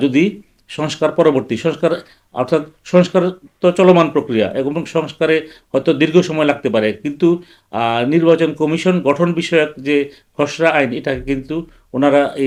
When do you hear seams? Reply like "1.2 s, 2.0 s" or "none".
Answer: none